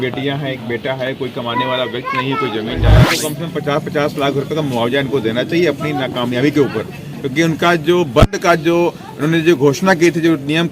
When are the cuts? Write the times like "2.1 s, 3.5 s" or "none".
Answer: 3.1 s